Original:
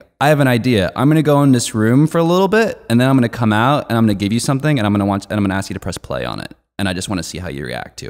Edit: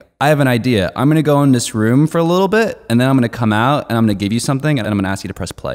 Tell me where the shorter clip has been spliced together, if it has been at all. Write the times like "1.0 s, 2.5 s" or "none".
4.8 s